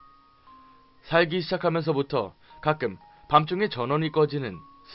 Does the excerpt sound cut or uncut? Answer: uncut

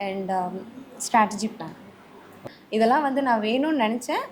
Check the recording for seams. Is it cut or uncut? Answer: cut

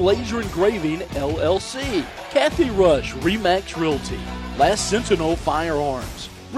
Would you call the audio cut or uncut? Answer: cut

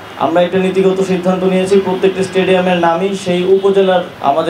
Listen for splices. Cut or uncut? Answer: uncut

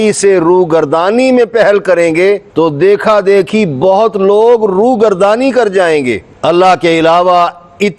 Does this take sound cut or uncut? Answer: cut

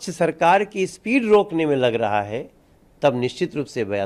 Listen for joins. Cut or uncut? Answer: uncut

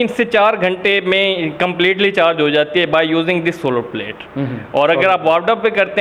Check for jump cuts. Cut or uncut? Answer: uncut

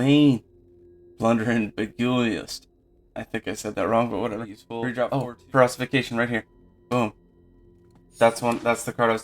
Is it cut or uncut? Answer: cut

